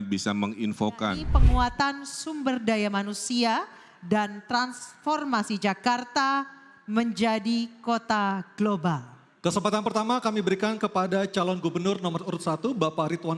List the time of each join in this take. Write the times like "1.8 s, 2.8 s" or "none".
1.3 s